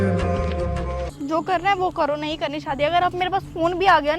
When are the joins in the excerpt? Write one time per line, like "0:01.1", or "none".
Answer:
0:01.1